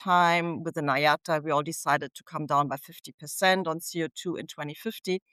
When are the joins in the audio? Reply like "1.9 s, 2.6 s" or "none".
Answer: none